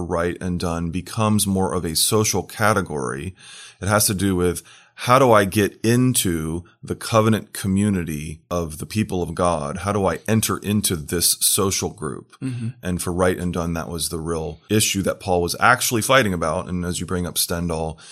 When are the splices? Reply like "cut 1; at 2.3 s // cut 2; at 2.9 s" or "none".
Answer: cut 1; at 8.4 s // cut 2; at 14.5 s